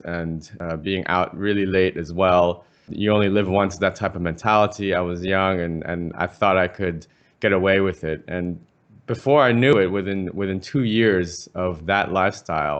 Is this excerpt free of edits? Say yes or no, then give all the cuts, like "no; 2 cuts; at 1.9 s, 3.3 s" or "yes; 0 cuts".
no; 1 cut; at 2.9 s